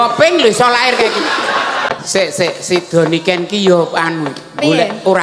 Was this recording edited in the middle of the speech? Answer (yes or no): yes